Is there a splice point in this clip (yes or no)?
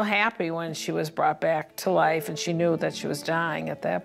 yes